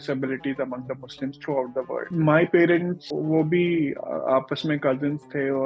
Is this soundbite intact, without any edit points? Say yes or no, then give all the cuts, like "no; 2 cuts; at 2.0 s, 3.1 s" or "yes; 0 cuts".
no; 2 cuts; at 2.1 s, 3.0 s